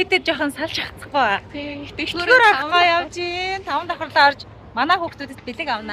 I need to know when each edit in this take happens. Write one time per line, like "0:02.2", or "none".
none